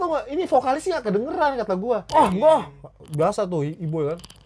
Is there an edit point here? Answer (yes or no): yes